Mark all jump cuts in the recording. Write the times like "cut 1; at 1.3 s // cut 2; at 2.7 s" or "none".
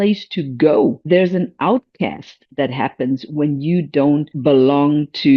cut 1; at 1.0 s // cut 2; at 4.3 s